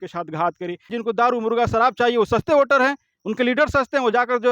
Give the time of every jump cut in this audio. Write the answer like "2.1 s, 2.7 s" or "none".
0.9 s